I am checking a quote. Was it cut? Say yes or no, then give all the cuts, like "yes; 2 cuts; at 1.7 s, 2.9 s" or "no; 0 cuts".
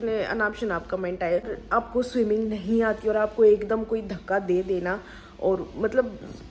yes; 1 cut; at 1.6 s